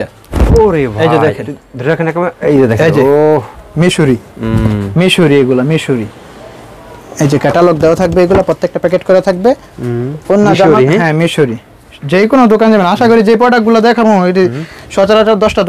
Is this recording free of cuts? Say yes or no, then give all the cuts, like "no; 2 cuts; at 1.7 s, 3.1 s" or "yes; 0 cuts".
yes; 0 cuts